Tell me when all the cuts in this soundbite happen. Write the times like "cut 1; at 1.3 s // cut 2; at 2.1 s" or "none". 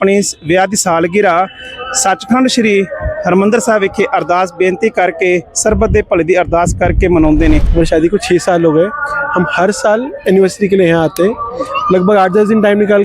cut 1; at 7.7 s